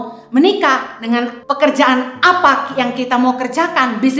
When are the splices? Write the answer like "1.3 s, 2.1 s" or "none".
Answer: 1.4 s

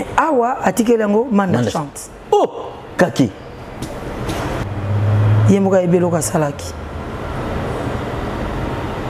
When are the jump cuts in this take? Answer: 4.6 s

